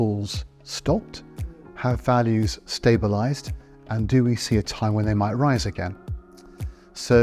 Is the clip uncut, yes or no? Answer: yes